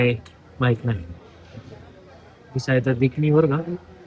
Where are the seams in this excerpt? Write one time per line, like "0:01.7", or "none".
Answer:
none

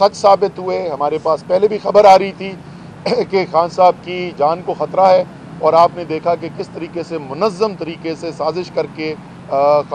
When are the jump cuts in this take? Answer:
none

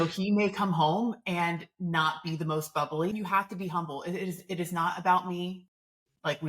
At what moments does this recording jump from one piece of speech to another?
0:03.1

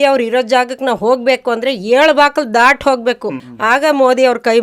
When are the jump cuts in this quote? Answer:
0:03.4

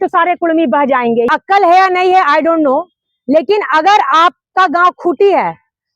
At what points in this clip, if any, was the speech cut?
0:01.3

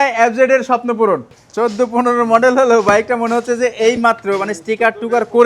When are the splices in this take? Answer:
0:01.4

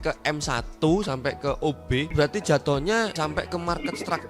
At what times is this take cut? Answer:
0:02.1
0:03.2

